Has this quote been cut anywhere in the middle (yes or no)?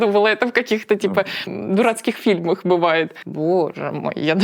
yes